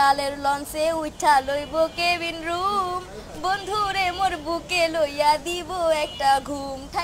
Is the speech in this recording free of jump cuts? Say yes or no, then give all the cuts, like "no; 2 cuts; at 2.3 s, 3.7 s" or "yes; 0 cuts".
yes; 0 cuts